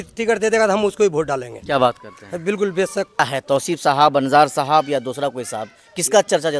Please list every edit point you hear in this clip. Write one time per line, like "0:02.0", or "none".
0:03.2